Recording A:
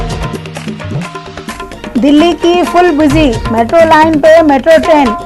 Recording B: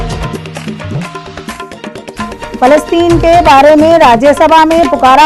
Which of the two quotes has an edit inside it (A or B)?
B